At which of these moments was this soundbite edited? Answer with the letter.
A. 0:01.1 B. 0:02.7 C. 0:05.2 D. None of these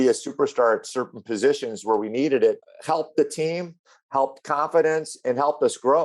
B